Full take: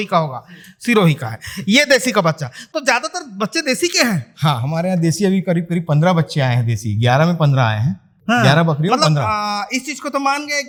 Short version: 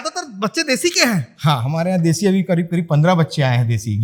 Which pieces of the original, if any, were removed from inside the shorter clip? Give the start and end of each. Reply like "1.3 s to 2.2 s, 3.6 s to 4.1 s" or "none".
none